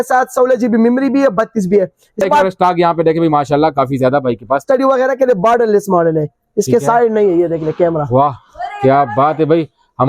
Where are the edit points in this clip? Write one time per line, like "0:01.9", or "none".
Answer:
0:02.2
0:04.6